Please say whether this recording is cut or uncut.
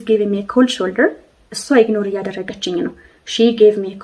uncut